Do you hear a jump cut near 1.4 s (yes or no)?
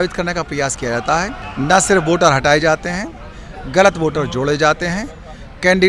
yes